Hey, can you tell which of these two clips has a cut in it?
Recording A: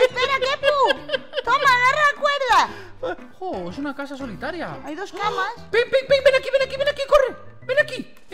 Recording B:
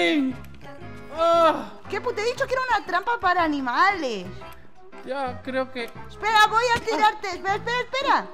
A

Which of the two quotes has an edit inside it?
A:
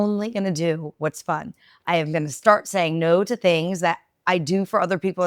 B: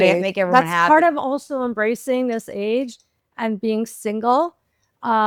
A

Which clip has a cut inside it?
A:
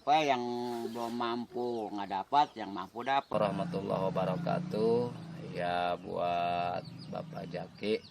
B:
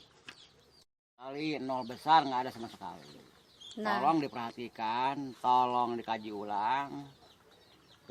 A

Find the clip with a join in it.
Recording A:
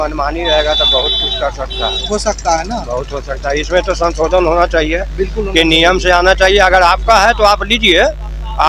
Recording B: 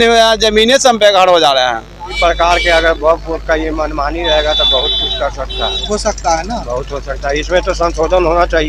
B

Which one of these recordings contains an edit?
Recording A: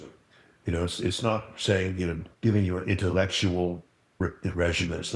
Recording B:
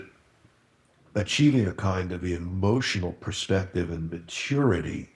A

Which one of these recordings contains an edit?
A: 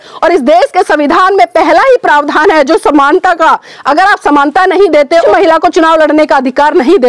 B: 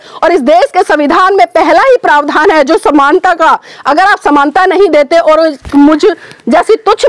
A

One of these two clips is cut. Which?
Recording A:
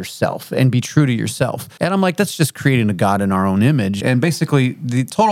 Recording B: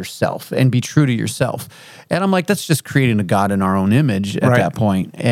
A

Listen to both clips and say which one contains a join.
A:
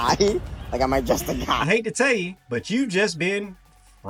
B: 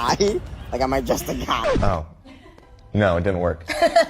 B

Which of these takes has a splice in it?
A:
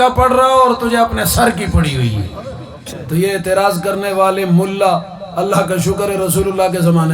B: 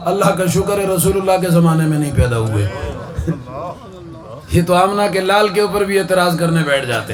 A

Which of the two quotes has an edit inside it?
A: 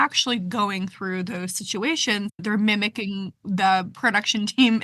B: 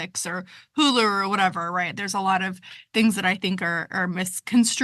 A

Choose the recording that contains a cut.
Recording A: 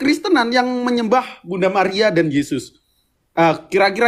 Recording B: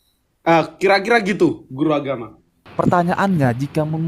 B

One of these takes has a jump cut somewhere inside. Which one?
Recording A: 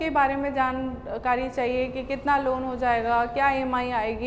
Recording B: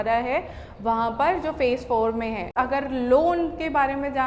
B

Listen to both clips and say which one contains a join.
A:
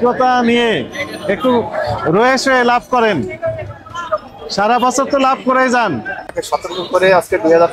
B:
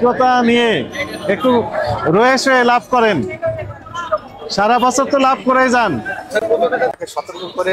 A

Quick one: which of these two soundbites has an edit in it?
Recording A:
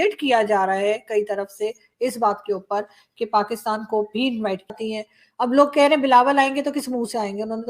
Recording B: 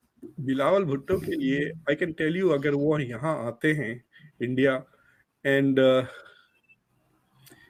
A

